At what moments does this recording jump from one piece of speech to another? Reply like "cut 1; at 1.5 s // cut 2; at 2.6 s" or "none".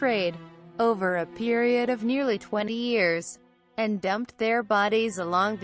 cut 1; at 3.7 s